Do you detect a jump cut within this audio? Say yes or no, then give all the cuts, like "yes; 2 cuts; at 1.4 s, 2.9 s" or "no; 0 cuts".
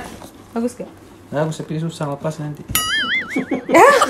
no; 0 cuts